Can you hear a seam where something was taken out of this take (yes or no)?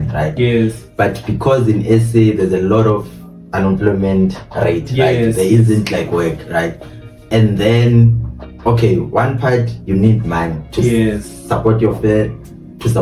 no